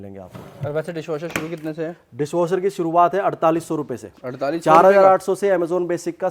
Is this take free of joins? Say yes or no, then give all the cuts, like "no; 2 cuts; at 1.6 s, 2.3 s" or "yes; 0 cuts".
yes; 0 cuts